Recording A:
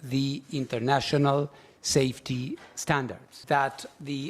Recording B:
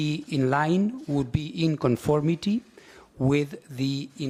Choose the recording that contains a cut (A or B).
A